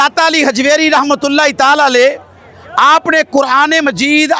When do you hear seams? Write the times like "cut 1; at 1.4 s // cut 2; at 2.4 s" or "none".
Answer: none